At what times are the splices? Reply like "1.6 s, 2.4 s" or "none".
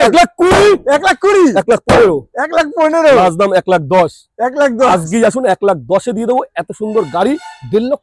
none